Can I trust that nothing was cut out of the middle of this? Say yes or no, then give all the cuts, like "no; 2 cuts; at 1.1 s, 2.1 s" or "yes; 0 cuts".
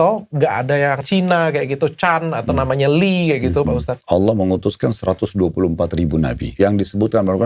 no; 3 cuts; at 1.0 s, 3.9 s, 6.4 s